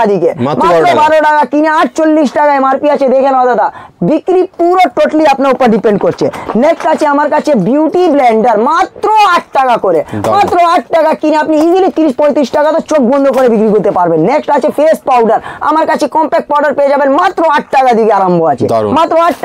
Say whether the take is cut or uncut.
uncut